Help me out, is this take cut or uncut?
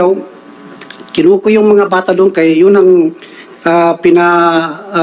uncut